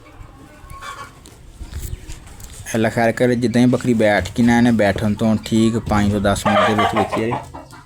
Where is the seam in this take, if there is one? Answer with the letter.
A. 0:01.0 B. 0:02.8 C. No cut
C